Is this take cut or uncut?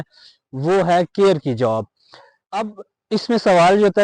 uncut